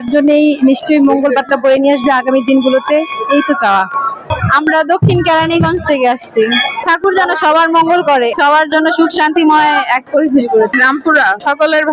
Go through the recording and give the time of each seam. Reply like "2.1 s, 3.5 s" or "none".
none